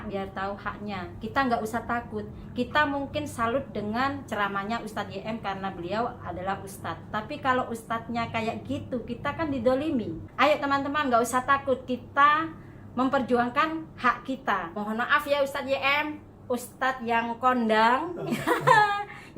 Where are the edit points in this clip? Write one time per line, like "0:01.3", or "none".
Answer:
0:10.2
0:14.8